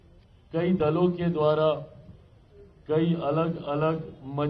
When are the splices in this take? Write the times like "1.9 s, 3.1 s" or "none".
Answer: none